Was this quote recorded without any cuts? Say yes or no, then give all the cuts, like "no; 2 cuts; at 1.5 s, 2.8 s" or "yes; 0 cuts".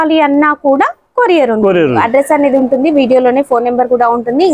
no; 1 cut; at 2.0 s